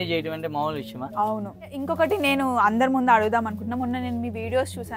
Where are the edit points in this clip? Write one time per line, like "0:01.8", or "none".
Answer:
0:01.8